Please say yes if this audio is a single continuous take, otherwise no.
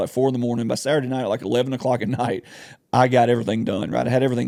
yes